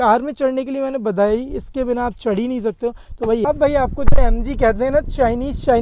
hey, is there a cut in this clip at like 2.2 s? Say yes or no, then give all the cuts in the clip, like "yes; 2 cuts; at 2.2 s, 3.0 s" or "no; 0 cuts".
no; 1 cut; at 3.4 s